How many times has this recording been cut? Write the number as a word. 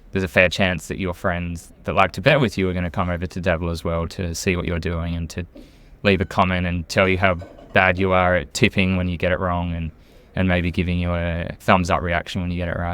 one